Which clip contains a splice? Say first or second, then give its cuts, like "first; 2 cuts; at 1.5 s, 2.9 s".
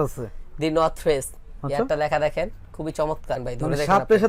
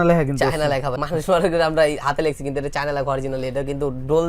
second; 1 cut; at 1.0 s